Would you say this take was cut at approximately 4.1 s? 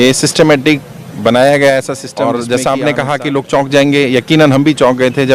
no; 1 cut; at 2.0 s

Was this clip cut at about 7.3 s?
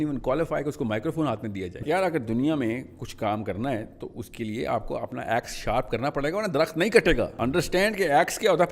yes; 2 cuts; at 1.8 s, 7.3 s

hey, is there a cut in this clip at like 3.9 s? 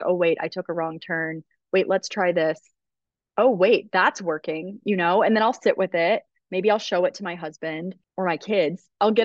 no; 1 cut; at 8.0 s

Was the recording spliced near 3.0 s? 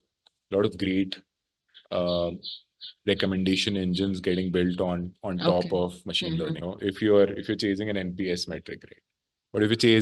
no; 1 cut; at 6.7 s

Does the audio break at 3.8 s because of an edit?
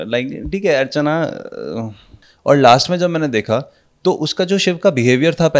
no; 1 cut; at 2.2 s

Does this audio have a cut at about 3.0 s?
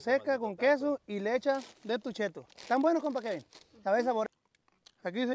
no; 1 cut; at 4.3 s

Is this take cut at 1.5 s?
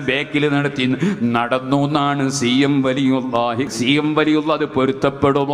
no; 1 cut; at 3.7 s

